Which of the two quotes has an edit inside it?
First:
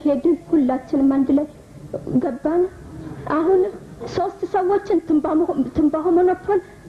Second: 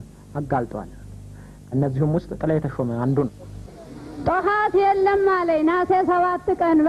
second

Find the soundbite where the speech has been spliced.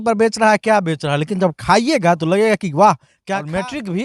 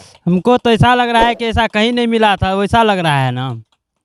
first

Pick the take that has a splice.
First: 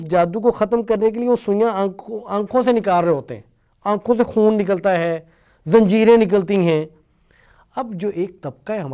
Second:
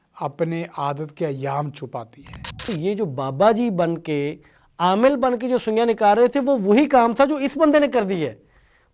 second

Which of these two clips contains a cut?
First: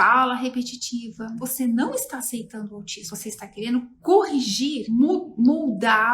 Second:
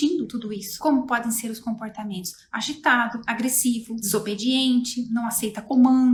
first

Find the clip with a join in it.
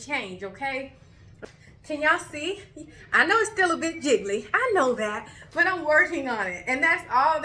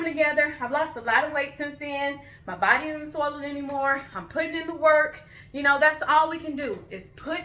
first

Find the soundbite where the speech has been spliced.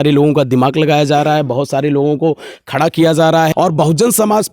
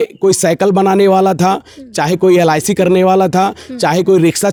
first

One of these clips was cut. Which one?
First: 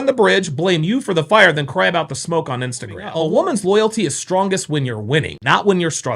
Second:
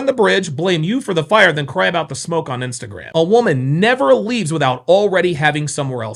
first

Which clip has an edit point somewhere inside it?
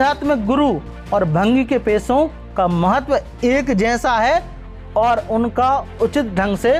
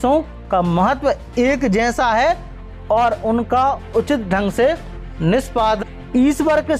second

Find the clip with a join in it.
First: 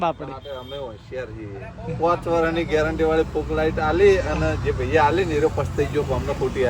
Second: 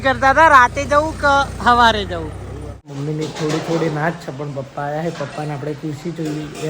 second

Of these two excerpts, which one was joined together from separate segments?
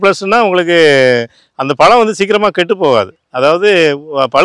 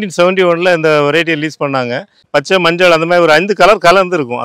second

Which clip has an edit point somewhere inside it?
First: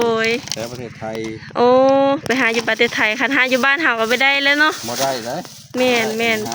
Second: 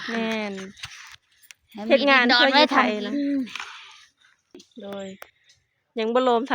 second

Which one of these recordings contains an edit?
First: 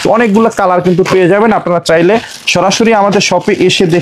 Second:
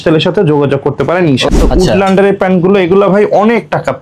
second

